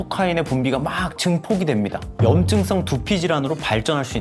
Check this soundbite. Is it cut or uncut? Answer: cut